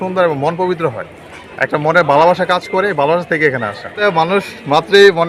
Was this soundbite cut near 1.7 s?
no; 1 cut; at 4.0 s

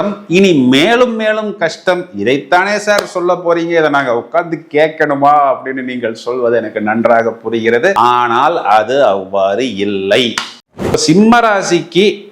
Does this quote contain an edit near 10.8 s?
yes; 1 cut; at 10.8 s

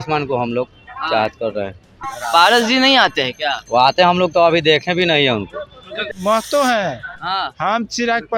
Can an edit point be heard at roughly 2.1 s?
yes; 2 cuts; at 2.1 s, 6.1 s

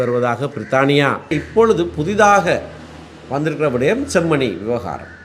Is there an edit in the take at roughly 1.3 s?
yes; 1 cut; at 1.3 s

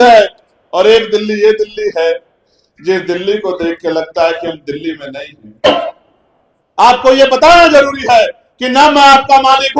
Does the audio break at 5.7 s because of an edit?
yes; 1 cut; at 5.7 s

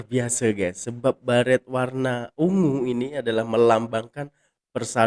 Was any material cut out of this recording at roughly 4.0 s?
no; 0 cuts

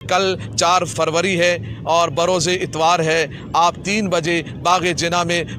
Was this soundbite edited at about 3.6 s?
no; 1 cut; at 0.9 s

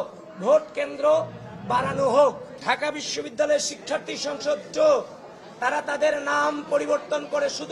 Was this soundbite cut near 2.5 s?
no; 0 cuts

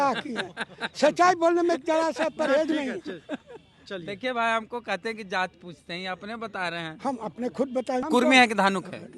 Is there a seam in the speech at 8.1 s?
yes; 1 cut; at 8.1 s

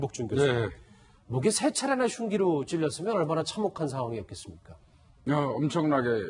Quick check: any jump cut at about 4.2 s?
yes; 1 cut; at 4.2 s

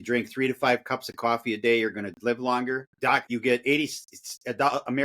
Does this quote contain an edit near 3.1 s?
yes; 1 cut; at 3.1 s

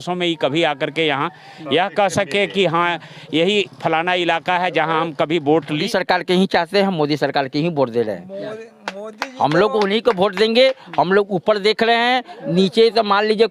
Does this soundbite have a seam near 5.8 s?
yes; 1 cut; at 5.8 s

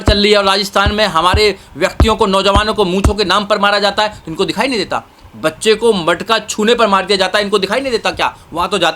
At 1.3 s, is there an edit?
no; 0 cuts

